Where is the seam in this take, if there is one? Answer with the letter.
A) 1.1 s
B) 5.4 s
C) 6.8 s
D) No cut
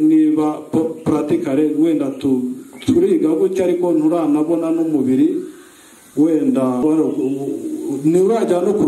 C